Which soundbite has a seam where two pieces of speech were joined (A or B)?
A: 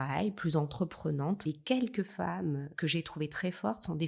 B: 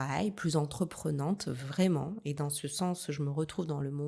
A